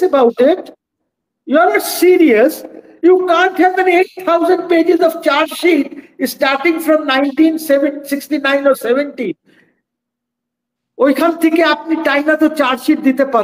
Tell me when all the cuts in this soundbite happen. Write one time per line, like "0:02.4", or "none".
none